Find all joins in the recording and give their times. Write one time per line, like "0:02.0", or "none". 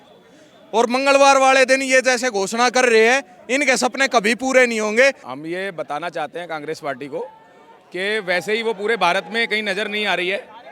0:05.2